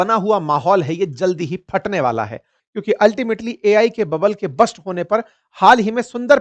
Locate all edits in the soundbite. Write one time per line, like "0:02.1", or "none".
0:02.6